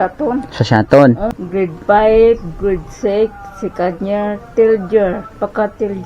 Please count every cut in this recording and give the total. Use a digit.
1